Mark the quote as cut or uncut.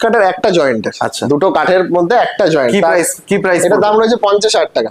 uncut